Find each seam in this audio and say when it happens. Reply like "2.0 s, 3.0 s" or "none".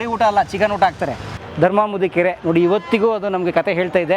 1.3 s